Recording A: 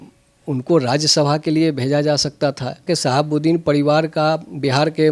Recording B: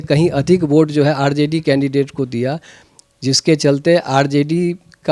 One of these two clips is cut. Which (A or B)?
A